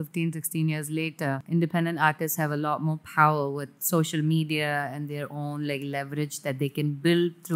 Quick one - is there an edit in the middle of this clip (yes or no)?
yes